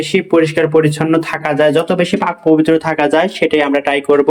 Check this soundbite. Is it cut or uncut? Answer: uncut